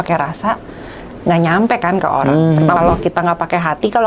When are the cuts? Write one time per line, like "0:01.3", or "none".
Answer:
0:02.8